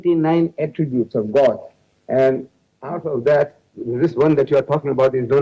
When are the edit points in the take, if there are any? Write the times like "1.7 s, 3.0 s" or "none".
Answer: none